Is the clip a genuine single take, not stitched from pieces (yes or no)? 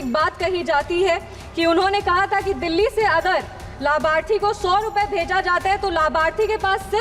yes